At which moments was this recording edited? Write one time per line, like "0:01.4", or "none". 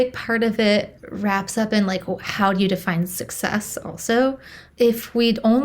0:01.0